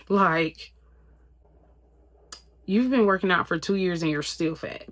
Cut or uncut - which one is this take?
uncut